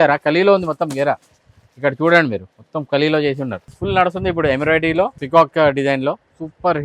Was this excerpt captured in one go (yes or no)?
no